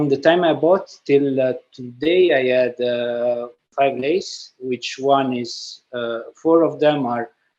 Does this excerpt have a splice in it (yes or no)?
yes